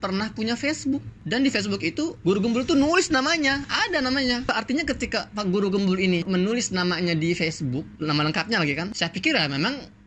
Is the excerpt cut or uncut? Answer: cut